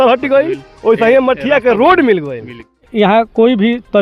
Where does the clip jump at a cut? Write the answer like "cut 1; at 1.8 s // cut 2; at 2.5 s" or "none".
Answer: cut 1; at 2.9 s